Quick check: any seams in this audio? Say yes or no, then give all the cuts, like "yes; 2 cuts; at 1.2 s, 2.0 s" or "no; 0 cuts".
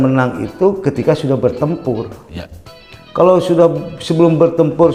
no; 0 cuts